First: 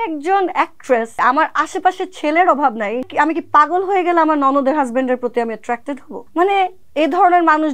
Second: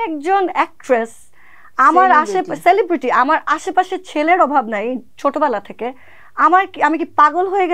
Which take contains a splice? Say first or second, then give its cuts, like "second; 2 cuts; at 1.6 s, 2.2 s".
first; 4 cuts; at 1.1 s, 3.1 s, 6.1 s, 6.8 s